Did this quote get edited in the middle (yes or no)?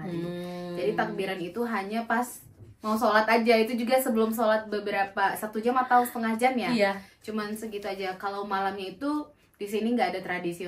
no